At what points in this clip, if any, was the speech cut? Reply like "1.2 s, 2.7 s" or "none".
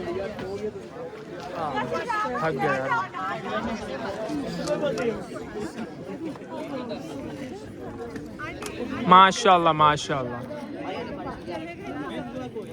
none